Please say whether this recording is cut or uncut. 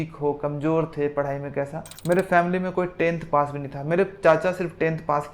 cut